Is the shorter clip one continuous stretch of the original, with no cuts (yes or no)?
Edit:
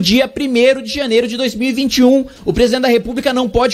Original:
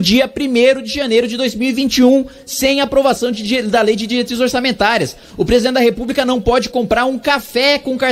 no